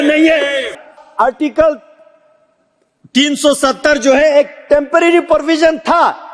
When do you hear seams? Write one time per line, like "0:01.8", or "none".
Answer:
0:01.0